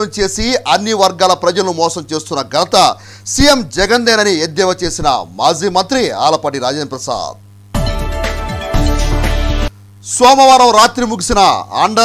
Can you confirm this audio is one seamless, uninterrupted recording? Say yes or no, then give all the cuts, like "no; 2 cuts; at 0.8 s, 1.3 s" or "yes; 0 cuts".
yes; 0 cuts